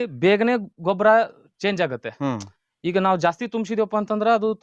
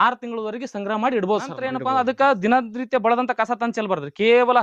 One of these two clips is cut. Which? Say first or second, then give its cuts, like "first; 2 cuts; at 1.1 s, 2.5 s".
second; 1 cut; at 1.7 s